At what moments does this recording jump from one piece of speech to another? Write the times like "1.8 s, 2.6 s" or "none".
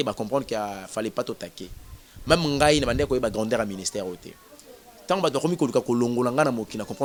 none